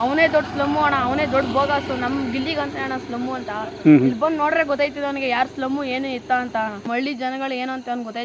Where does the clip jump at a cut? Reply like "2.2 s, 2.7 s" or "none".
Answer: 6.9 s